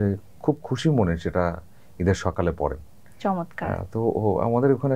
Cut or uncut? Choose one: uncut